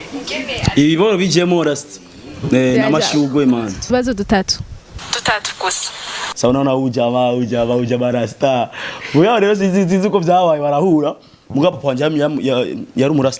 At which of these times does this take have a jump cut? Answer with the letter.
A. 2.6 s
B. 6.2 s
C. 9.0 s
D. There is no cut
B